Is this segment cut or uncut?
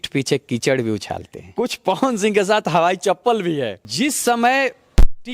cut